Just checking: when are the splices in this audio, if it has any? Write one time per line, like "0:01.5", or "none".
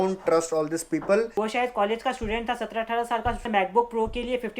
0:01.3
0:03.4